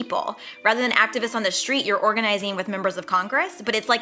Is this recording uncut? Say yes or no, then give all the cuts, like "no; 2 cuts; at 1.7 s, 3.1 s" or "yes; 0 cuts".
yes; 0 cuts